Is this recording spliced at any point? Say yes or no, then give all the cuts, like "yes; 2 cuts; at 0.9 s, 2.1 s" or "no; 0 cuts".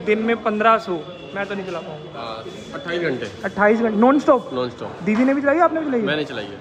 no; 0 cuts